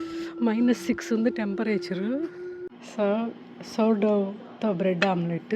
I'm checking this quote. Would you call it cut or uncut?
cut